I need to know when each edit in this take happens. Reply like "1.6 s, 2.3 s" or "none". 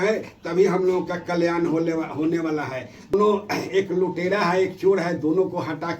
3.1 s